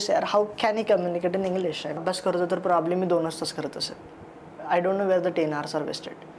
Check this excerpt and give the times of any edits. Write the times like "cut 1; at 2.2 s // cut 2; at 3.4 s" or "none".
cut 1; at 2.0 s